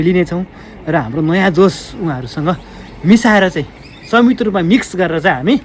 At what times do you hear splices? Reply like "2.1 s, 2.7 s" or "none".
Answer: none